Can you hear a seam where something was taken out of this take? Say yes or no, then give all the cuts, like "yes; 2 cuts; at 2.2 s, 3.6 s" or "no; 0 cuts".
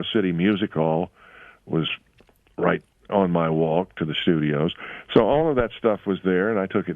yes; 1 cut; at 3.1 s